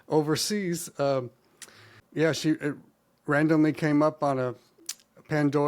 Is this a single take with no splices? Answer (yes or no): no